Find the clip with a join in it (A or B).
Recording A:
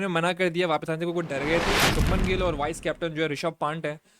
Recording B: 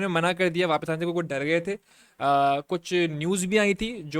A